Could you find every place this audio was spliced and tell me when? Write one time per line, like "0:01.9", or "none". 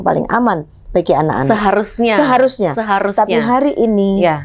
none

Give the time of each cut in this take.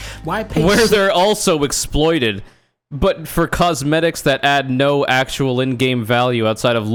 none

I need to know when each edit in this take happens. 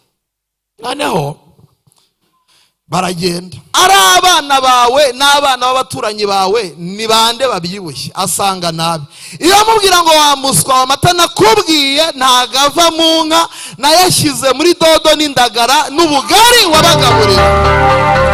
0:03.7

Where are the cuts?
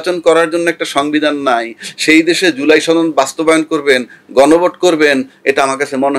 none

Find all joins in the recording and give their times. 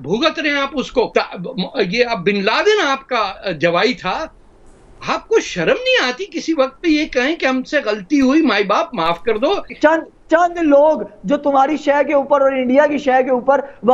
0:01.1
0:09.7

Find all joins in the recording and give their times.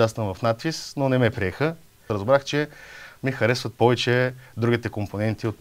0:02.1

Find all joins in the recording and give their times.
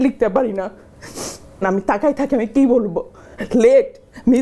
0:01.6

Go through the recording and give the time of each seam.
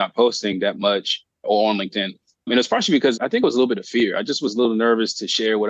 none

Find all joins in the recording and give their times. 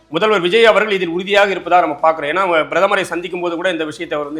none

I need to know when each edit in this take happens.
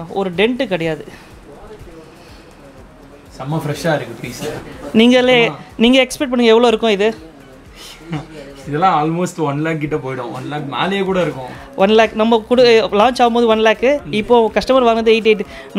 none

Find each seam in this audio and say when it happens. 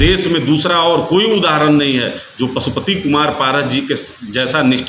none

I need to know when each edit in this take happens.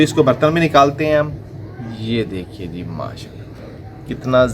none

